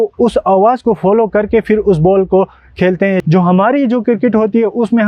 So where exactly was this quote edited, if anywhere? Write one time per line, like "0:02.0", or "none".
0:03.2

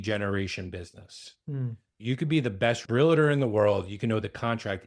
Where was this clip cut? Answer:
0:01.9
0:02.8

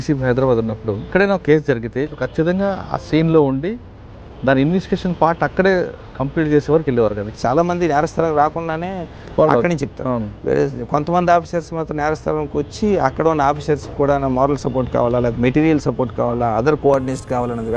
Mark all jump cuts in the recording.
0:01.1
0:02.1
0:07.3

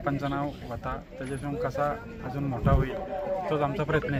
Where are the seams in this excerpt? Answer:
none

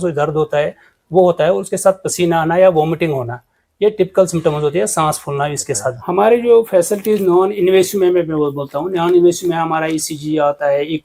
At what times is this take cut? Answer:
0:05.9

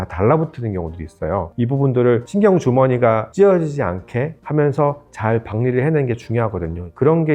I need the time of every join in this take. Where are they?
0:01.5
0:02.3
0:03.3
0:04.4

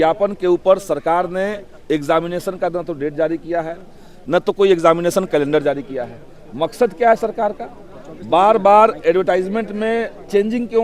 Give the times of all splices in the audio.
none

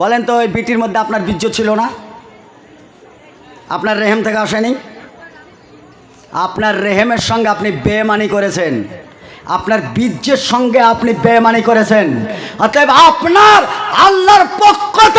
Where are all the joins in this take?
none

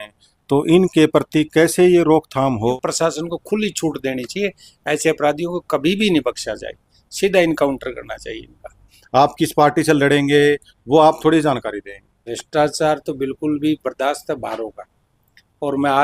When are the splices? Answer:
0:02.7
0:08.9
0:12.3

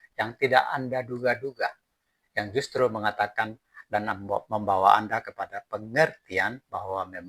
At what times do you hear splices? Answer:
none

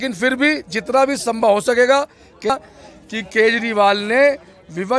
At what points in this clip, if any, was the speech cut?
0:02.5

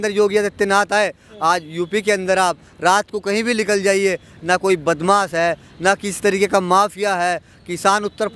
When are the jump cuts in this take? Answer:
none

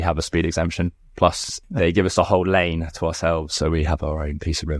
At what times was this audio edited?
0:01.5

